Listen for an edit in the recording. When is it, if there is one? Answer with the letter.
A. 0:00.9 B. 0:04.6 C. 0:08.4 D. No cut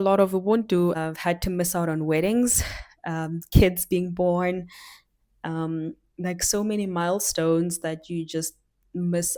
A